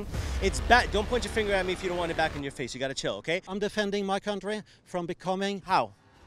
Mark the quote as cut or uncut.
cut